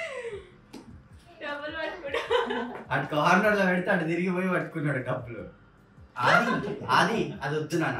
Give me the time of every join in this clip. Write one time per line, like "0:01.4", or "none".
0:06.1